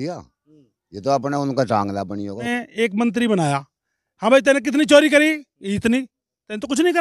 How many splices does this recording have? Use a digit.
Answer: 1